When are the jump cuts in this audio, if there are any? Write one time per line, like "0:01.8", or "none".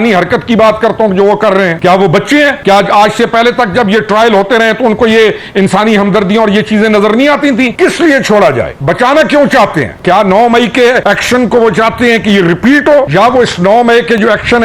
0:01.8
0:02.6
0:07.7
0:08.7
0:09.9
0:11.0
0:13.1